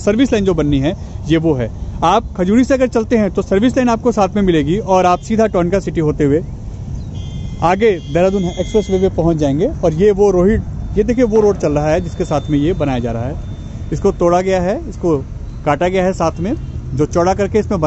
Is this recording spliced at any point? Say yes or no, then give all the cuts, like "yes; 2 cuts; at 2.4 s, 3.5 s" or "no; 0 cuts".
no; 0 cuts